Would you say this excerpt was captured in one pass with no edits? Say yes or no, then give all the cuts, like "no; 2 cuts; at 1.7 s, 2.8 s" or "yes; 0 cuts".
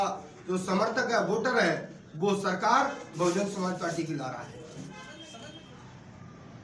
no; 1 cut; at 5.2 s